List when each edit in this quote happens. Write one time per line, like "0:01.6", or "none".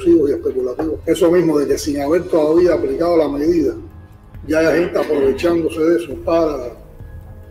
0:01.0